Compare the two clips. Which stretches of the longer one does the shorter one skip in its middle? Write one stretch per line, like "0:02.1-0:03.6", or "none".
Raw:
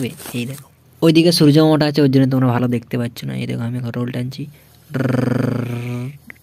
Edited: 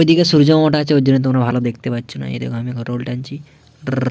none